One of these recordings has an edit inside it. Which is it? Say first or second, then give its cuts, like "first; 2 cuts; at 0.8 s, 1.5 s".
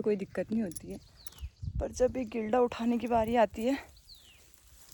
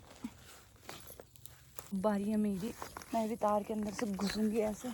second; 1 cut; at 1.9 s